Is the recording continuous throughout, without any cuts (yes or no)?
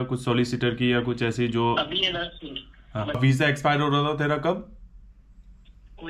no